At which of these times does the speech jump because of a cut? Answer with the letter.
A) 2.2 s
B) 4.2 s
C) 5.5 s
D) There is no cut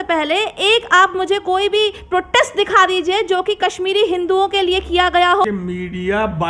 C